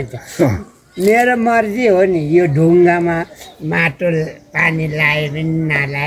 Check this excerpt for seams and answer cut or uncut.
uncut